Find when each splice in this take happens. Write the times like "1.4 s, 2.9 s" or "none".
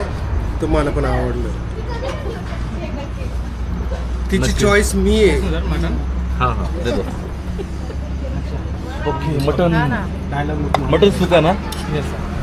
none